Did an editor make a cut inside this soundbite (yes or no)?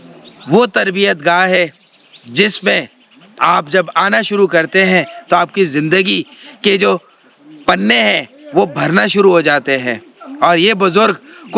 no